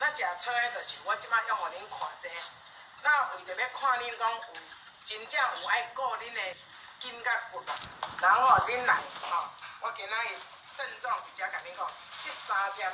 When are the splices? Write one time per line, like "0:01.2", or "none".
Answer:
none